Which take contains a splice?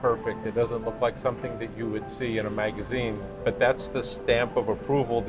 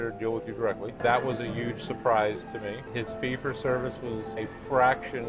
second; 3 cuts; at 1.0 s, 2.9 s, 4.3 s

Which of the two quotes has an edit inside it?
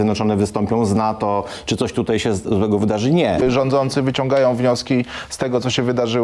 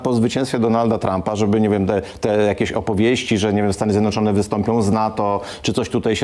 first; 1 cut; at 3.4 s

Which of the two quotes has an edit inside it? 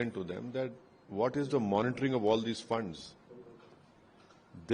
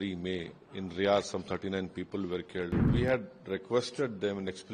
second; 1 cut; at 2.9 s

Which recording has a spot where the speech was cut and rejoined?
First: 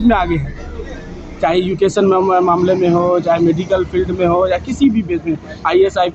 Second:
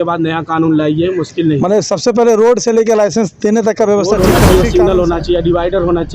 second; 1 cut; at 4.1 s

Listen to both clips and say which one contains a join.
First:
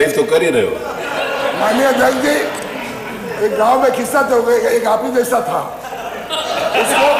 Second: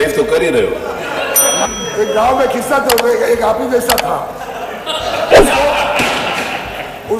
second; 1 cut; at 1.6 s

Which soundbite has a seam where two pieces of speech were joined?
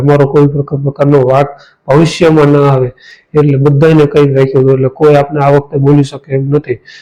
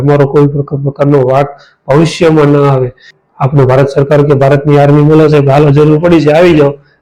second; 1 cut; at 3.2 s

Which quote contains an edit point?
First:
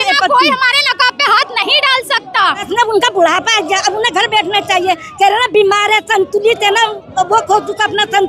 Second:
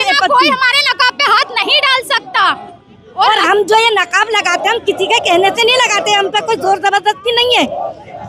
first; 1 cut; at 2.7 s

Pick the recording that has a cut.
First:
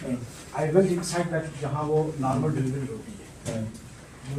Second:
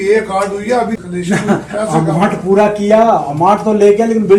second; 1 cut; at 1.0 s

